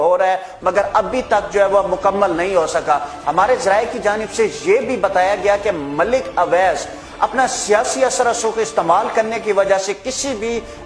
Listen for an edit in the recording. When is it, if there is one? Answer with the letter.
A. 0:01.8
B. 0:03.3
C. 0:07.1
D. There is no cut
D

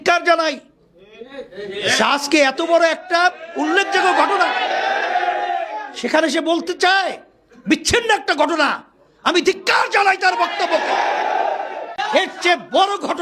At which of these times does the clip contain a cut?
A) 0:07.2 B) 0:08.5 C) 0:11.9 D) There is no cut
C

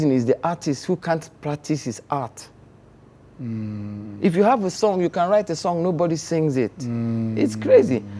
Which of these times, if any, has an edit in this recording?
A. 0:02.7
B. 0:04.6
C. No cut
C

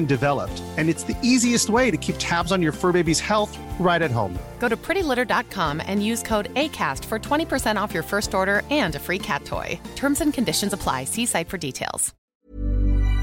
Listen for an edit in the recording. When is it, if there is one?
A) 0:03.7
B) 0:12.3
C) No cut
B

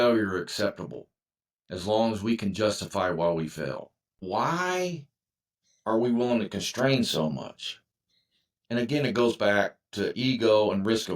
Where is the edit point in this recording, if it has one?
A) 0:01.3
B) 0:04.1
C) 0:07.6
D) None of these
B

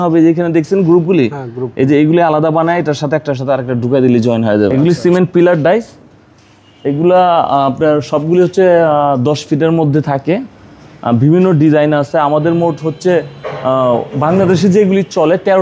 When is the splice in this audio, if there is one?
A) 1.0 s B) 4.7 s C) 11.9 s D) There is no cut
B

